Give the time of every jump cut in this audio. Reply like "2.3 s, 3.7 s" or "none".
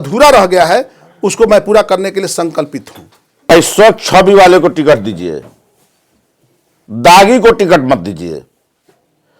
3.5 s